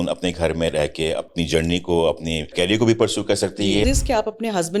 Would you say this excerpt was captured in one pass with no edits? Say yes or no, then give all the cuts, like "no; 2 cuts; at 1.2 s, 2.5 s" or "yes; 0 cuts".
no; 3 cuts; at 1.3 s, 2.5 s, 3.8 s